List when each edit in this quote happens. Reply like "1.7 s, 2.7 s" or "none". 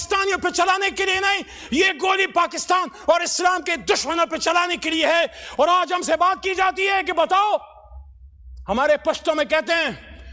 none